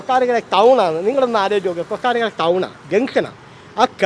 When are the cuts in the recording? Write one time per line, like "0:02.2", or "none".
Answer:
none